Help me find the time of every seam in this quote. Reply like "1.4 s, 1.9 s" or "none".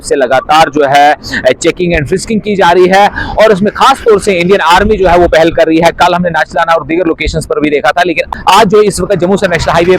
9.0 s